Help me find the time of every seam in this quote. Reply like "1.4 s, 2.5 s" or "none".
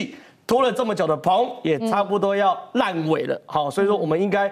none